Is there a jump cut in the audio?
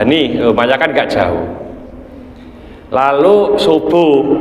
no; 0 cuts

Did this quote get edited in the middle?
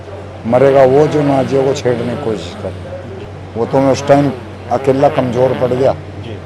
yes; 1 cut; at 3.3 s

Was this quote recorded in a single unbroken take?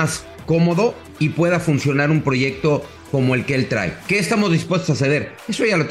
no; 2 cuts; at 1.1 s, 3.0 s

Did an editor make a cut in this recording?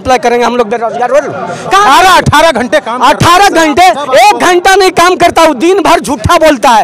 no; 0 cuts

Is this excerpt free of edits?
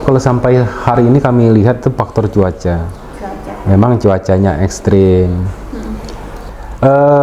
no; 1 cut; at 6.3 s

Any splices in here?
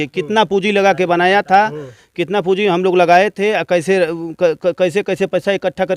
no; 0 cuts

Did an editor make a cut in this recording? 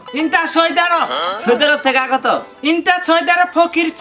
no; 0 cuts

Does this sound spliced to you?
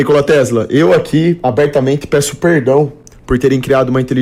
no; 0 cuts

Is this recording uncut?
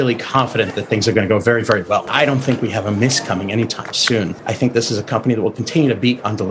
no; 2 cuts; at 2.1 s, 4.4 s

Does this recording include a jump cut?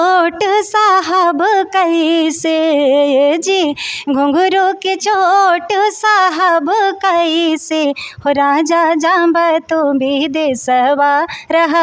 no; 0 cuts

